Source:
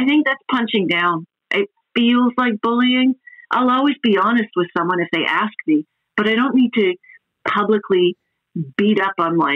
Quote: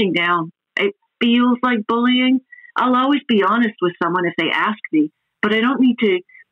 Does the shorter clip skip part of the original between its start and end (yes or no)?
no